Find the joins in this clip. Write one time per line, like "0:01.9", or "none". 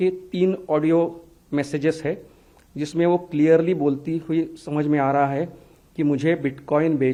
none